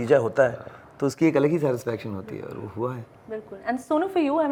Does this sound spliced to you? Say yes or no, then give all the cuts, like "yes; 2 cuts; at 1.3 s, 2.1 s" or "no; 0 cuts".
no; 0 cuts